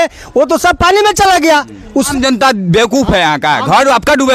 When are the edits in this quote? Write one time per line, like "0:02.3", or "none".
0:02.1